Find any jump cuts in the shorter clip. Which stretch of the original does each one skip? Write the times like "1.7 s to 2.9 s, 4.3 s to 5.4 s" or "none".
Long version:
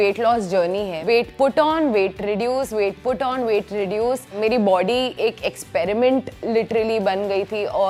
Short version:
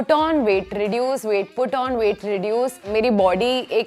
none